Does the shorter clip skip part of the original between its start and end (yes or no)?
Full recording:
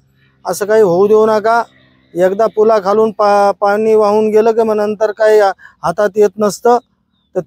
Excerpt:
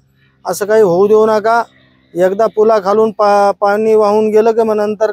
no